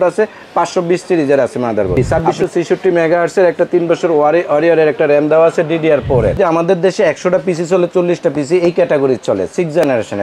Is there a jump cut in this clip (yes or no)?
yes